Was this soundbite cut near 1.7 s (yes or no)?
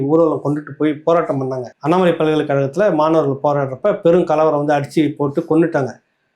yes